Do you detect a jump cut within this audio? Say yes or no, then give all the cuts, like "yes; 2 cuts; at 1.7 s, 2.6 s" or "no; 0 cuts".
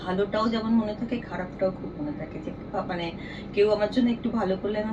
no; 0 cuts